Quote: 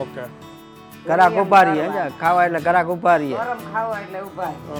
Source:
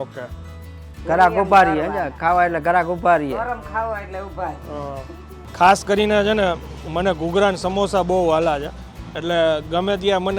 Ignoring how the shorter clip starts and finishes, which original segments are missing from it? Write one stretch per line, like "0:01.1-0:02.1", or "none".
none